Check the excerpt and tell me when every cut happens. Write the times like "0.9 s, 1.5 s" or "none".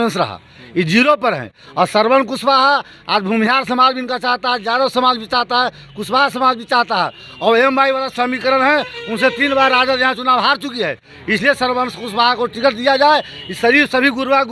none